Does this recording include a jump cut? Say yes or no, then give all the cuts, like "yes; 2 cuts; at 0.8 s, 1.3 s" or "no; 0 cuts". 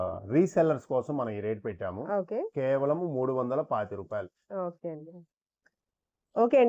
no; 0 cuts